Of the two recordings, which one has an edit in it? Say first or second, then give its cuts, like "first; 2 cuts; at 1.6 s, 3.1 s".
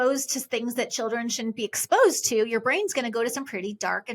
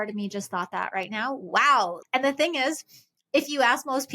second; 1 cut; at 2.0 s